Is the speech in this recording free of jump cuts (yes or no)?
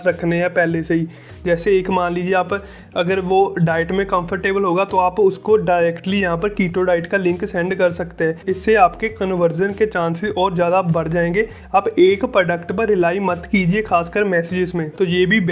yes